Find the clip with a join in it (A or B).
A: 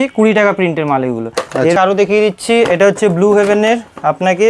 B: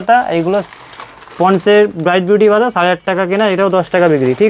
A